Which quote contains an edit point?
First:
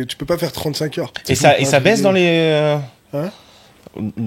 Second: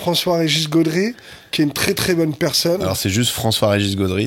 first; 1 cut; at 1.1 s

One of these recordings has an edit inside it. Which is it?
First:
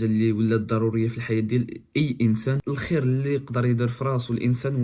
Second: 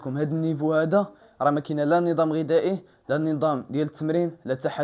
first; 1 cut; at 2.6 s

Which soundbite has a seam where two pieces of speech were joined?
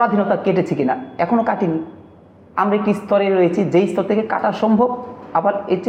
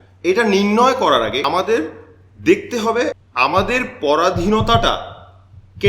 second; 2 cuts; at 1.4 s, 3.2 s

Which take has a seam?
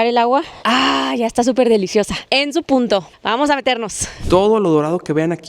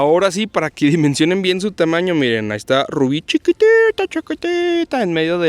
first; 1 cut; at 4.1 s

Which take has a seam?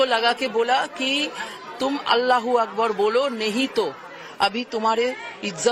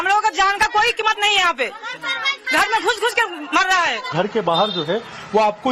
second; 1 cut; at 4.1 s

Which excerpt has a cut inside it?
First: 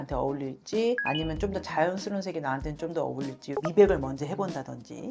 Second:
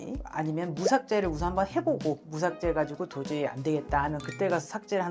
first; 1 cut; at 3.5 s

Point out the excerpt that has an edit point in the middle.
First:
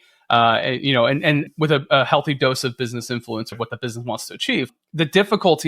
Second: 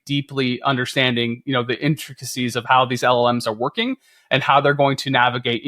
first; 2 cuts; at 3.5 s, 4.8 s

